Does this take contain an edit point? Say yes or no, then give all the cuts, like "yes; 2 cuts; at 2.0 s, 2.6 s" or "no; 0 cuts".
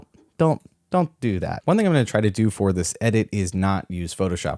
yes; 1 cut; at 1.5 s